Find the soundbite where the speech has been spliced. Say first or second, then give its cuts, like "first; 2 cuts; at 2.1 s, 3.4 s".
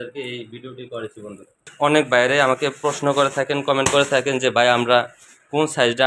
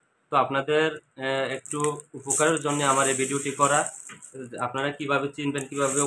first; 1 cut; at 1.6 s